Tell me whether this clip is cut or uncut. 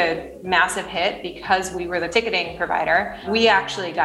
cut